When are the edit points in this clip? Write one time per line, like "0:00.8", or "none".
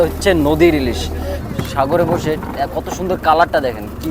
0:01.3